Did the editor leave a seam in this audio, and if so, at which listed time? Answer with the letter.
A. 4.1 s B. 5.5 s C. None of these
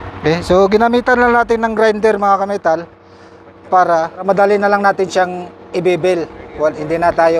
A